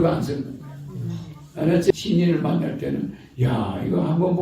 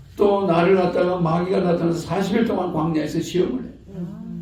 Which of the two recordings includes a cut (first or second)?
first